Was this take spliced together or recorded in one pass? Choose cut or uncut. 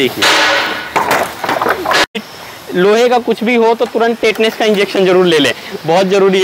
cut